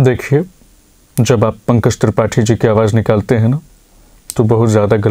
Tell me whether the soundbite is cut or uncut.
uncut